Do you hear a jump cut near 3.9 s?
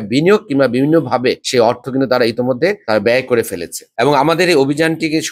yes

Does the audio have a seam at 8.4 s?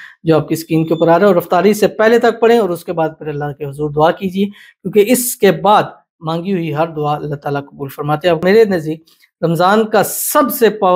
yes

